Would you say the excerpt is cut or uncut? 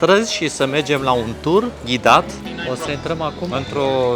cut